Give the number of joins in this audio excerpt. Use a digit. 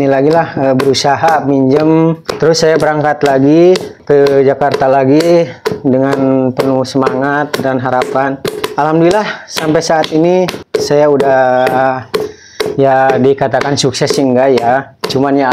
4